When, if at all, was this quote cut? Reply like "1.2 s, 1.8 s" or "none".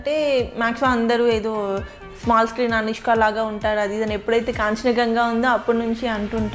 none